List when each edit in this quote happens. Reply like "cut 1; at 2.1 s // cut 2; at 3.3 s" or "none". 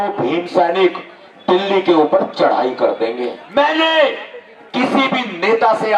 cut 1; at 3.4 s